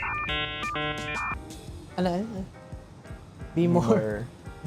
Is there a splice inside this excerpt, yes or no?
no